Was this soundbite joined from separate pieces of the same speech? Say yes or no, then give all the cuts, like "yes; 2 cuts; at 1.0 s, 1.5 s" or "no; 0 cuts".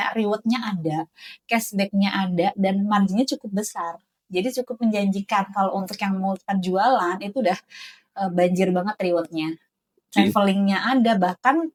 no; 0 cuts